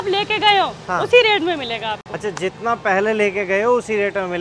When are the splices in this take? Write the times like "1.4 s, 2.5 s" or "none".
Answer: none